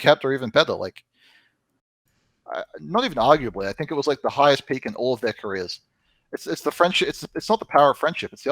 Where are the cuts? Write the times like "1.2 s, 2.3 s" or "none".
1.9 s